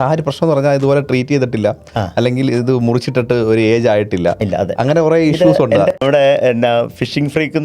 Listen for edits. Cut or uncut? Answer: cut